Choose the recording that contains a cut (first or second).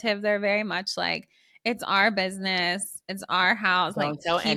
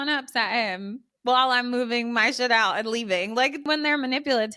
second